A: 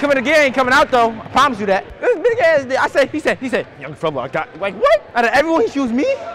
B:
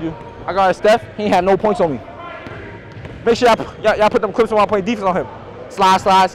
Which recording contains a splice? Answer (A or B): A